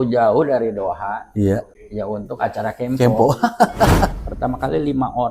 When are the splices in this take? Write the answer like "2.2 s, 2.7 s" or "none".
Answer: 1.8 s, 4.2 s